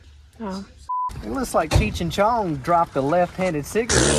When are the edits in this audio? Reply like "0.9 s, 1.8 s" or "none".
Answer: 1.1 s